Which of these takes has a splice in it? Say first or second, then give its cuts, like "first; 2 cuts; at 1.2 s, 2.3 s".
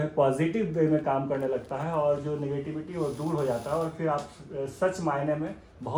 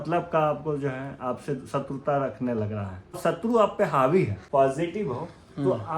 second; 2 cuts; at 3.2 s, 4.4 s